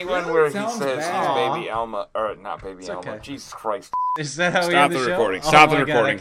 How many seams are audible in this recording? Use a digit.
1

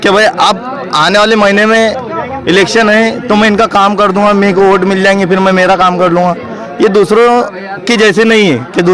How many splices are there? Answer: 0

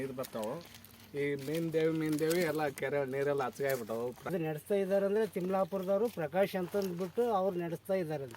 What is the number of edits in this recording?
1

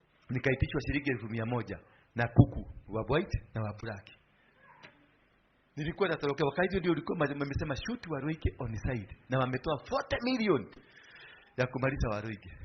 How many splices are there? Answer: 0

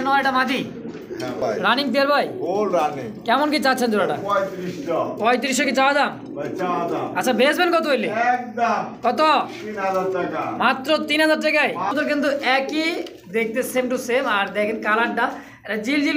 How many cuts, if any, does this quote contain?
2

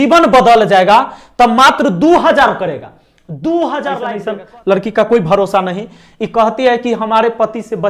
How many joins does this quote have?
1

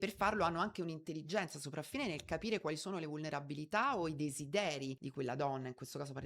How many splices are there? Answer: 1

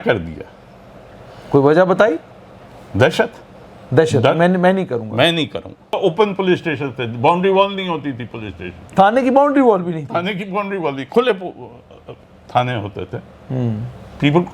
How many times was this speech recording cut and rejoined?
1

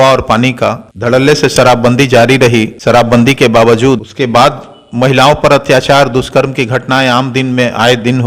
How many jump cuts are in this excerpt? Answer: 3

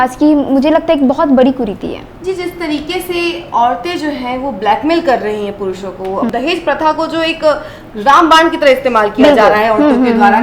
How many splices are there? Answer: 2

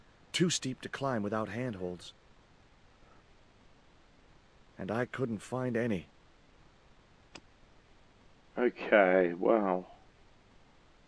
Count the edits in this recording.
0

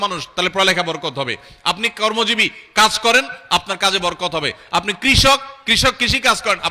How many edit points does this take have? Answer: 0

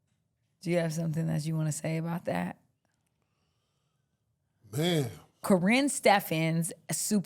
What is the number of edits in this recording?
1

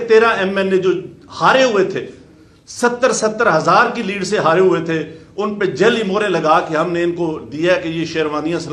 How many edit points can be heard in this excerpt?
0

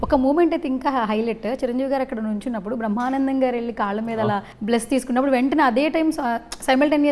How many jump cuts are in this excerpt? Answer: 1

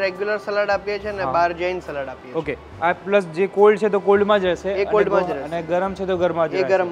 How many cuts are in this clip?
0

